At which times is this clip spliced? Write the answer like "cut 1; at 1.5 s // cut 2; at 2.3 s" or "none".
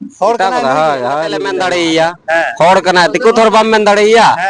cut 1; at 1.5 s